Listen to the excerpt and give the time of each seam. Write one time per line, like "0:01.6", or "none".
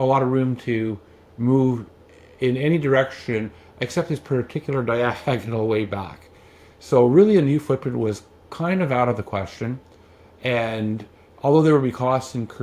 none